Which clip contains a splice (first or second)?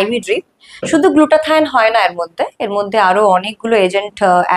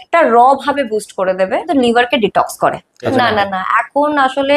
second